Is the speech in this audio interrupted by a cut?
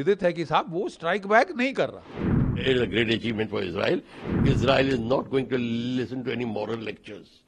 yes; 2 cuts; at 2.5 s, 4.2 s

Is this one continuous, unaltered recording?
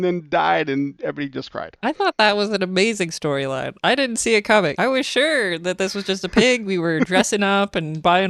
no; 1 cut; at 4.7 s

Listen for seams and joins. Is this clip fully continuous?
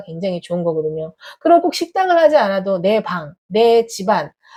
yes; 0 cuts

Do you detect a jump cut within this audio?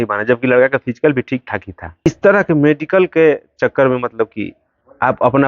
yes; 1 cut; at 2.1 s

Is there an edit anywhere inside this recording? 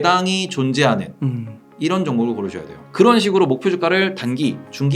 yes; 1 cut; at 2.8 s

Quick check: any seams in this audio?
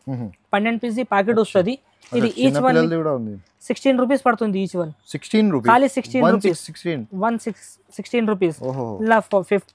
no; 0 cuts

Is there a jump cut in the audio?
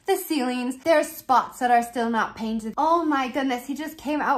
yes; 2 cuts; at 0.8 s, 2.7 s

